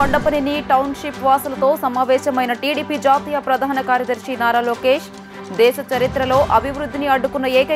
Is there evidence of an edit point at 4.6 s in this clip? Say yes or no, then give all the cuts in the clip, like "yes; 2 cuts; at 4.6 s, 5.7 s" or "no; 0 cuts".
no; 0 cuts